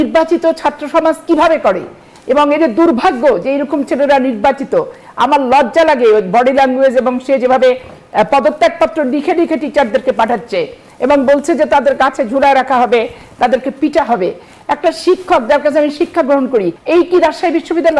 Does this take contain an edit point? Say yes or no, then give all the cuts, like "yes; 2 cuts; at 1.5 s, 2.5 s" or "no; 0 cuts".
yes; 1 cut; at 16.8 s